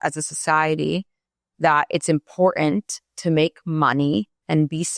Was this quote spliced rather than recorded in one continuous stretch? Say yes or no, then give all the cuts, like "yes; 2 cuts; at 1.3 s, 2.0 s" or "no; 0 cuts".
no; 0 cuts